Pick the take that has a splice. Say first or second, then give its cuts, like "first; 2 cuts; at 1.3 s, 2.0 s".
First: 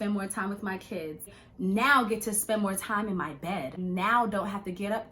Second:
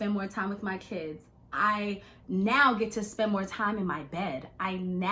first; 2 cuts; at 1.4 s, 3.8 s